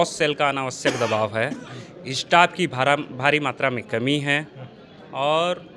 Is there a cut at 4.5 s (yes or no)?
no